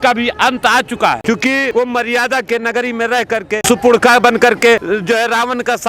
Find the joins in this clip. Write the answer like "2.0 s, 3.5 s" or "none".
1.6 s, 3.5 s, 4.8 s